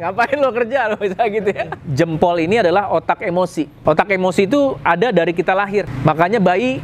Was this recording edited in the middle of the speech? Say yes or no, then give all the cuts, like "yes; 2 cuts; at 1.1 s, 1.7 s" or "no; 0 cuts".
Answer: yes; 3 cuts; at 1.8 s, 3.7 s, 5.9 s